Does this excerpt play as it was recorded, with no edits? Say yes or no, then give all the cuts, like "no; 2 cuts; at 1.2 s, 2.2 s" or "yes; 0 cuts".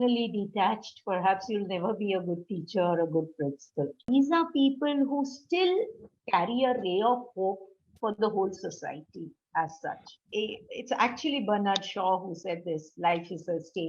no; 2 cuts; at 4.0 s, 10.2 s